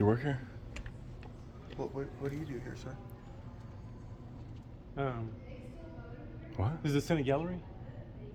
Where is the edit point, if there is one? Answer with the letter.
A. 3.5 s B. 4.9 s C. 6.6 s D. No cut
D